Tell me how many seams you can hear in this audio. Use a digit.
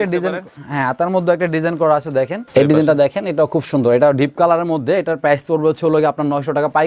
1